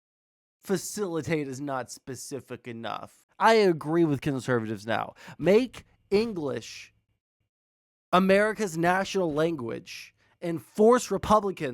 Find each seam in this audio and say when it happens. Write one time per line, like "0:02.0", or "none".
0:03.2